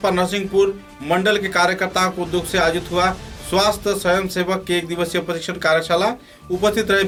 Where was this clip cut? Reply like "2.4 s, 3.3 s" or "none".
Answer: none